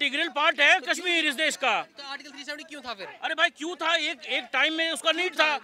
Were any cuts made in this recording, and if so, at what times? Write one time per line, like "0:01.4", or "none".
none